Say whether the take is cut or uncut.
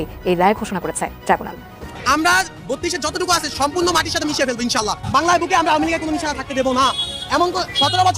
cut